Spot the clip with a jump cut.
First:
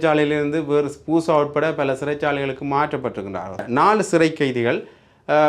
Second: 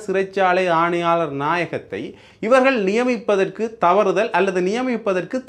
first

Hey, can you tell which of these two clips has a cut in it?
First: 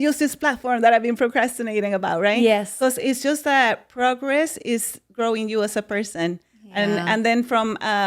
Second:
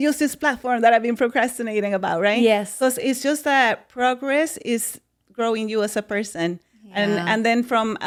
first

